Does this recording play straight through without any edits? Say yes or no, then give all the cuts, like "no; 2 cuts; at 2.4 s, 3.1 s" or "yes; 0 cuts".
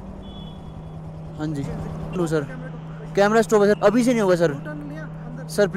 no; 1 cut; at 2.1 s